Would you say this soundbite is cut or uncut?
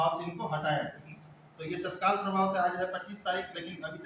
uncut